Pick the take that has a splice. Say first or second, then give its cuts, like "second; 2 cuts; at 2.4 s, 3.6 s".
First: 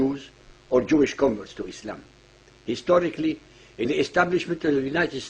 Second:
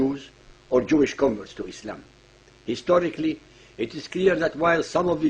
second; 1 cut; at 3.9 s